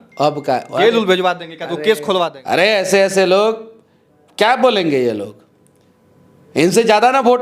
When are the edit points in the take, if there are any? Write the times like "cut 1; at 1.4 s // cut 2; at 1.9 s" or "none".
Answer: cut 1; at 2.4 s